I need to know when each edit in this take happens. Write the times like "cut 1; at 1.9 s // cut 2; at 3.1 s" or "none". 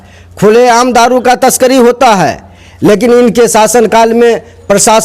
none